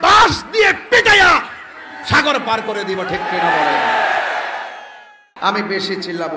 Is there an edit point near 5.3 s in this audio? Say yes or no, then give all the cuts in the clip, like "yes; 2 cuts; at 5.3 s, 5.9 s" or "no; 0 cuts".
yes; 1 cut; at 5.3 s